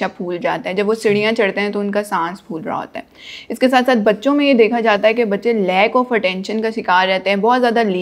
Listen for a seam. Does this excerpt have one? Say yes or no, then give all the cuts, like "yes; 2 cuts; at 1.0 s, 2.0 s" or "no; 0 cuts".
no; 0 cuts